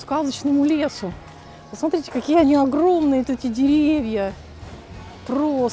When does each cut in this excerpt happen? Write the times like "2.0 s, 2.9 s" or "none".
none